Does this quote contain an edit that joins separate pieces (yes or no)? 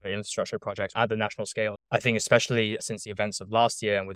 yes